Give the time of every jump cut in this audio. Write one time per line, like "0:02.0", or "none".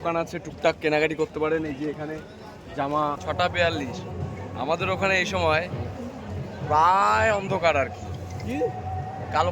0:03.2